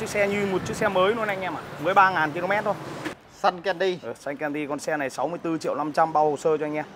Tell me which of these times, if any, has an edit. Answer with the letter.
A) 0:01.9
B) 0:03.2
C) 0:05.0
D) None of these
B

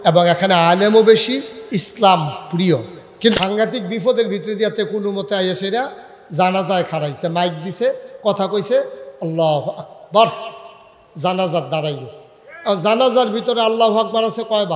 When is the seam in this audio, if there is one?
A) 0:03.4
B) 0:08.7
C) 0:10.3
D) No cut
A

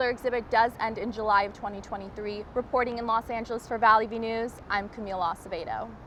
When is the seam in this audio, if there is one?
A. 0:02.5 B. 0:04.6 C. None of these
C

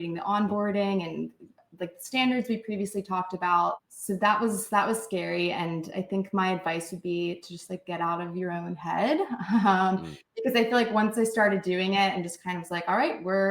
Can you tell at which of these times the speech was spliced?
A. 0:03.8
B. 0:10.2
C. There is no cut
A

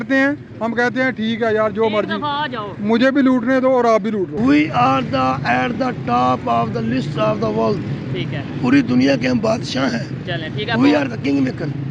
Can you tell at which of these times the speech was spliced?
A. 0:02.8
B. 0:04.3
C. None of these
B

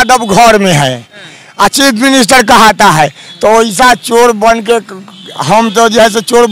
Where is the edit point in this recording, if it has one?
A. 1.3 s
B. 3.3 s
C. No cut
C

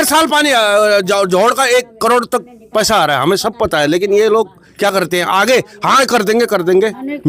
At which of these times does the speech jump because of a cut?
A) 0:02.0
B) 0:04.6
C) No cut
C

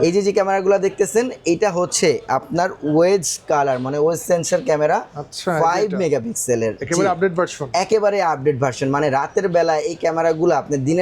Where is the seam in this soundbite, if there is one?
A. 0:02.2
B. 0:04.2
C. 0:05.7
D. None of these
D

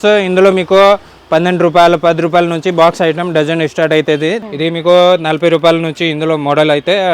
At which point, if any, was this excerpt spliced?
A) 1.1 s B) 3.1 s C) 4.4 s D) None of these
C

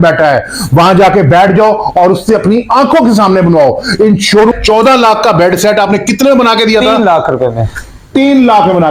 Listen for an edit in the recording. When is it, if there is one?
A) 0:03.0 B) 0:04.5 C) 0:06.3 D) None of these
B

